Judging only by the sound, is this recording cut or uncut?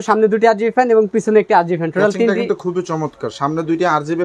uncut